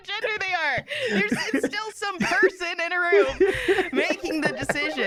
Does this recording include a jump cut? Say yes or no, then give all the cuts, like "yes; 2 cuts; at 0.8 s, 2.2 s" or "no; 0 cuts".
no; 0 cuts